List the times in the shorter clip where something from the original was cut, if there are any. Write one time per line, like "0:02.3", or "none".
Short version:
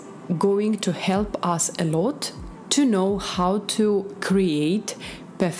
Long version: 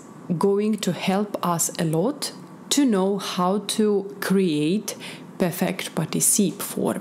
none